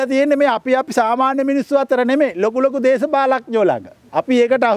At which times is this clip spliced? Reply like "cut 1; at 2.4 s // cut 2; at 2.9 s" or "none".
none